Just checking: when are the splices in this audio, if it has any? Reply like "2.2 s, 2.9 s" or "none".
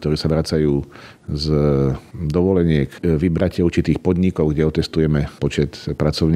3.0 s, 5.3 s